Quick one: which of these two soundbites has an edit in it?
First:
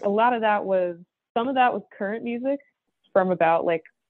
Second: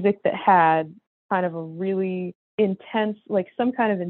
first; 1 cut; at 2.8 s

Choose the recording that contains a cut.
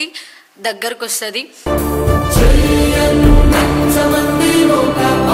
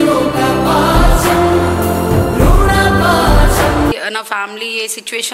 second; 1 cut; at 4.0 s

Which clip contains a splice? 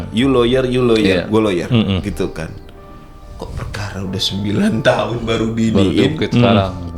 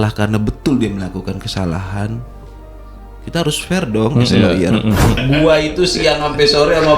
second; 1 cut; at 5.2 s

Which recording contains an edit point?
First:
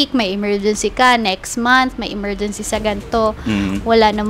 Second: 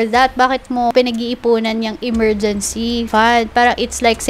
second; 2 cuts; at 0.9 s, 3.1 s

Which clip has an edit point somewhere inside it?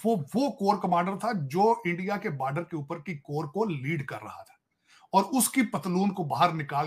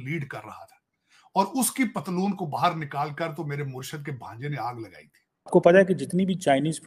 second; 1 cut; at 5.4 s

